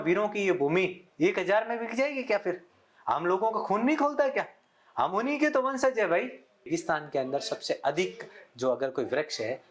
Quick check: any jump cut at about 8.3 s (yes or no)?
no